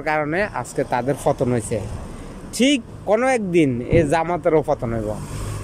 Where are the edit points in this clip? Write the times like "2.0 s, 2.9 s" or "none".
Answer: 2.9 s